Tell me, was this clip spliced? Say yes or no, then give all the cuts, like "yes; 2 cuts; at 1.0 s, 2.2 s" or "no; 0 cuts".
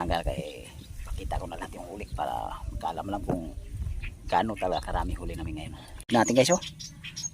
yes; 1 cut; at 6.1 s